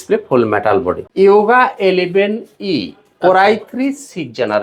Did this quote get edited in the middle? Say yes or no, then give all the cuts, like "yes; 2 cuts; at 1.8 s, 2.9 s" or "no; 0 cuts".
yes; 1 cut; at 1.0 s